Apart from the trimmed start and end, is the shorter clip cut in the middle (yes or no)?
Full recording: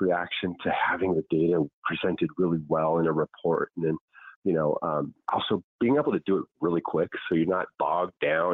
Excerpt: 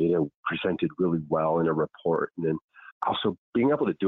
yes